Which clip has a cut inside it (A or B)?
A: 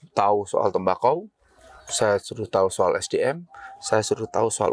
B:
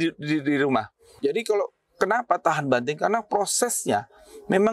B